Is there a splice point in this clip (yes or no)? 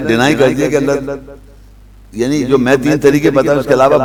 no